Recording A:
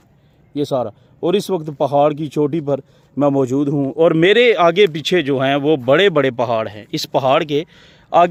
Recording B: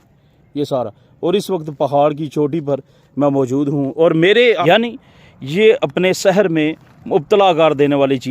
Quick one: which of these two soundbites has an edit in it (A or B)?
B